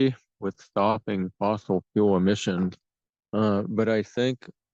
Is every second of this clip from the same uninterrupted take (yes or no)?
yes